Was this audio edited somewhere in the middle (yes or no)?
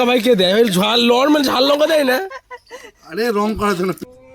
no